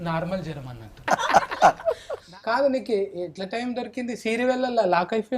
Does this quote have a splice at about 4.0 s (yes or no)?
no